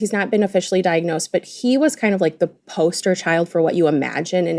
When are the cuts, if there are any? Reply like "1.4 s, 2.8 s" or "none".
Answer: none